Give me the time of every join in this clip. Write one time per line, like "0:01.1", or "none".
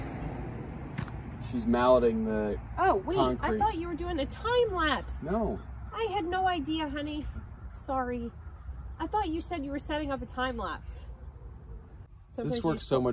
0:12.1